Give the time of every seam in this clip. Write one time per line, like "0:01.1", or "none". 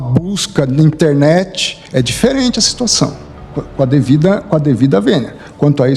none